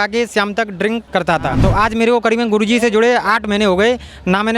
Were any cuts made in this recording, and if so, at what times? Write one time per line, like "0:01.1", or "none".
0:01.4